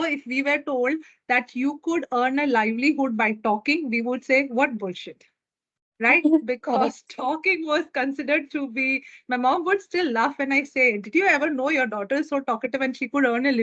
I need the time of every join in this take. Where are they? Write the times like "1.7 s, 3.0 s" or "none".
none